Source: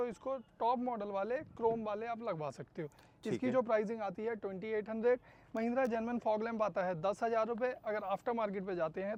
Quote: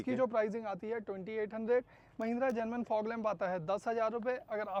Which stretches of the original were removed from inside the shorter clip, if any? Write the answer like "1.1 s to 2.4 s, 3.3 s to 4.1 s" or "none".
none

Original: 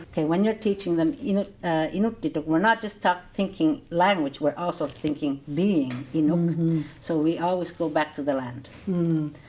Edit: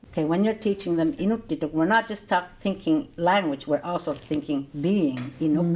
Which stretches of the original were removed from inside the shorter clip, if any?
1.2 s to 1.9 s

